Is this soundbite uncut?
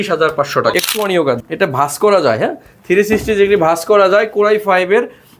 no; 1 cut; at 0.9 s

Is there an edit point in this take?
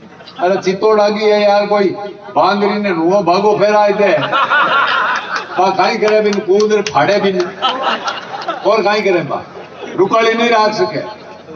no; 0 cuts

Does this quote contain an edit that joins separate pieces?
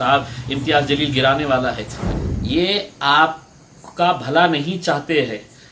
yes; 1 cut; at 1.8 s

